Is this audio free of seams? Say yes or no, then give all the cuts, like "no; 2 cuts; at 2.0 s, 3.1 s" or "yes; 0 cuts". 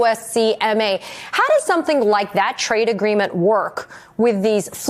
yes; 0 cuts